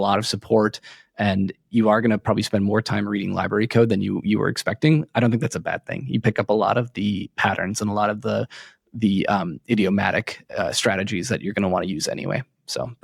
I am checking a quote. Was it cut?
no; 0 cuts

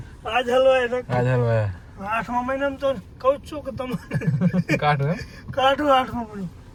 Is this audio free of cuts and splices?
yes; 0 cuts

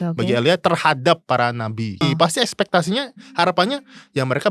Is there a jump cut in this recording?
yes; 1 cut; at 2.0 s

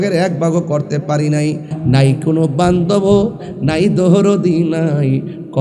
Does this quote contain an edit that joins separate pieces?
yes; 1 cut; at 1.7 s

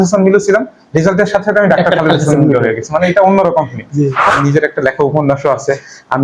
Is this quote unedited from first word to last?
no; 1 cut; at 4.3 s

